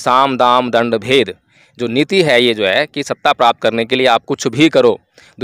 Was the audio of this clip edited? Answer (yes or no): no